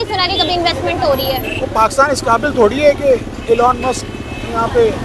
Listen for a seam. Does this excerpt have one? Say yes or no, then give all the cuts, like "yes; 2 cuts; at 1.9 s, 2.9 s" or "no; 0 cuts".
no; 0 cuts